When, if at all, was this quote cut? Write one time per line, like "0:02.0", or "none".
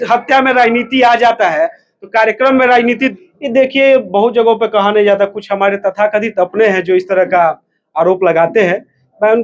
0:03.1